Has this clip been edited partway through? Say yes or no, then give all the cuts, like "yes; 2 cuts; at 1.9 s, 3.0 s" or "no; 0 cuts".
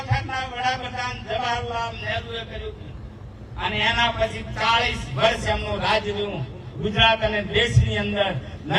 no; 0 cuts